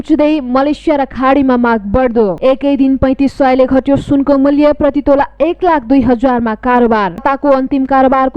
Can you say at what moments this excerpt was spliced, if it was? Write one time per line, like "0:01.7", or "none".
0:02.4
0:07.2